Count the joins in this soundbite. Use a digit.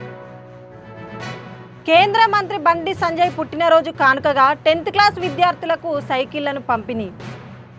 1